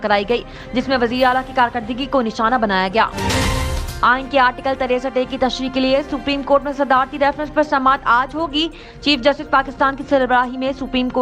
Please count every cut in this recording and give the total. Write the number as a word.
one